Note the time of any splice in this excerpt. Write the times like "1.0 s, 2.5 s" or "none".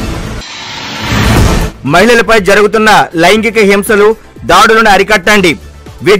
none

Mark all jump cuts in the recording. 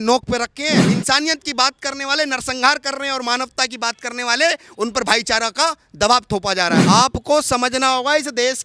0.9 s, 6.8 s

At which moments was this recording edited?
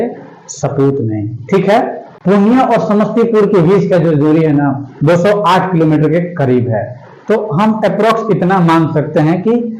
2.1 s

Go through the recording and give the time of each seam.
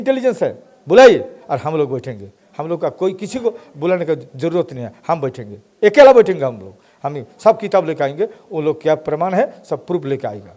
none

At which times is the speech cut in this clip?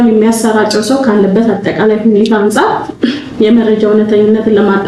none

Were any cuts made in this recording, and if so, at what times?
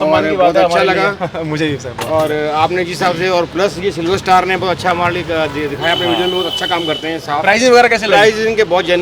none

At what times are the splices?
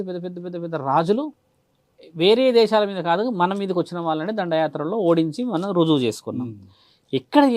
none

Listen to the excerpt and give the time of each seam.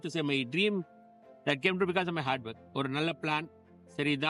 none

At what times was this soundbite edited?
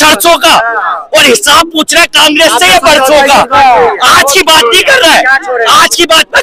none

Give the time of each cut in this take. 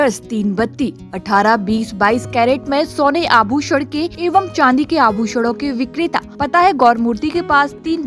4.1 s, 6.3 s

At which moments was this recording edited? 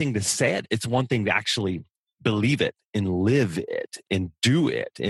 none

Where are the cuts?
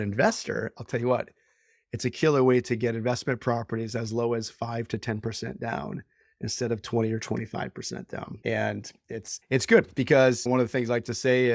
8.3 s, 9.3 s, 10.4 s

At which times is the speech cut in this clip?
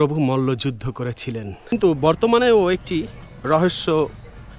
1.7 s

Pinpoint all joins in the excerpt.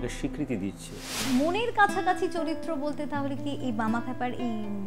1.2 s

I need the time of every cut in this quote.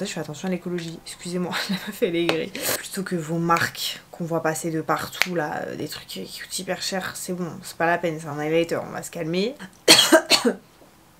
2.7 s, 9.6 s

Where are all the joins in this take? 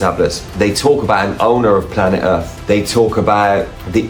none

